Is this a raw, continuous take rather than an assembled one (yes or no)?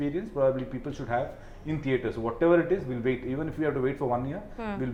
yes